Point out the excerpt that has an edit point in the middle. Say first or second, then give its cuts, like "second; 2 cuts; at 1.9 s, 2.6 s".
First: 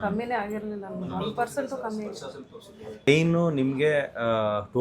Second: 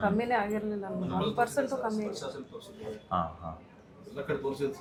first; 1 cut; at 3.1 s